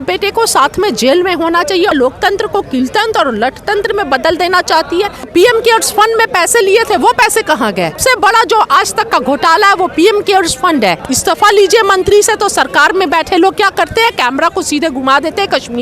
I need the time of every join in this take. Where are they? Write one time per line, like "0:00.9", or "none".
0:01.9
0:05.3
0:08.0
0:11.1